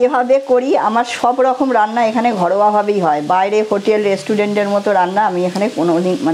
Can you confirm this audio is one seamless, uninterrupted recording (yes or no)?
yes